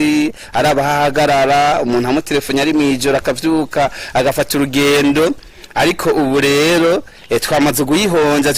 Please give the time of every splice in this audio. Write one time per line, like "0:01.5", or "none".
none